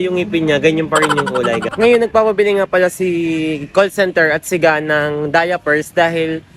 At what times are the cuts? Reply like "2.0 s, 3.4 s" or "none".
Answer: 1.7 s